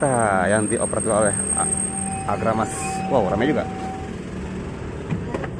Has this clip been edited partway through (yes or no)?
no